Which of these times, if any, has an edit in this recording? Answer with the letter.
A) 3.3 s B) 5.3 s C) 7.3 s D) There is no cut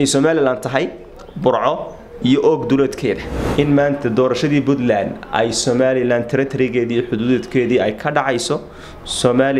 A